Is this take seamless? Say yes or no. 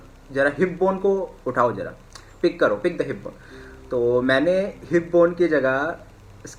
yes